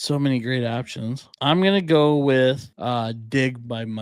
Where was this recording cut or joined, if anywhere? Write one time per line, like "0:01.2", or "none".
0:01.3
0:02.7